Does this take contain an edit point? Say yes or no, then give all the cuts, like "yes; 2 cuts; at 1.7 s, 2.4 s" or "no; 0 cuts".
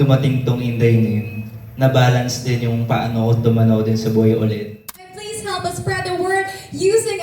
yes; 1 cut; at 5.1 s